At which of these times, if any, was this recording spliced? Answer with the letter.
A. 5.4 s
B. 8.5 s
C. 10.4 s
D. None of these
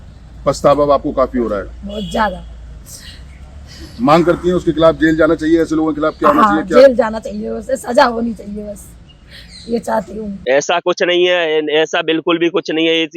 C